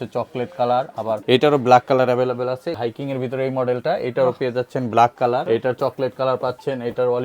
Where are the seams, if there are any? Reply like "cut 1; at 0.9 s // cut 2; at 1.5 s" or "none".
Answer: cut 1; at 1.2 s // cut 2; at 2.8 s // cut 3; at 5.4 s